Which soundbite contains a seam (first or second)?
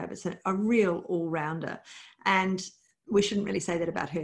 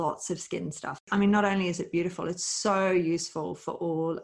second